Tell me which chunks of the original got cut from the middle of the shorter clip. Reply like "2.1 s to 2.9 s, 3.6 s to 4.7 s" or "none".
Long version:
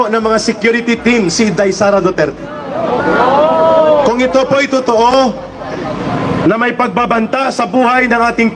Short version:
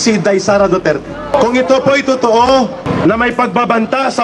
2.7 s to 4.0 s, 5.5 s to 6.3 s